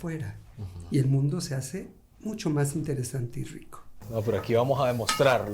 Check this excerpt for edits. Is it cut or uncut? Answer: cut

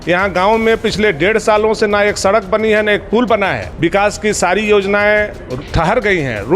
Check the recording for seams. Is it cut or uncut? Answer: cut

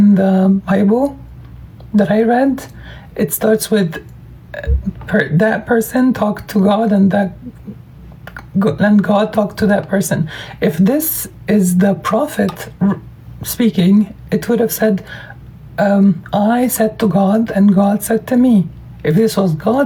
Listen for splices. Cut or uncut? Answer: uncut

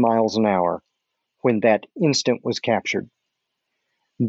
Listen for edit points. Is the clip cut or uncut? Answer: uncut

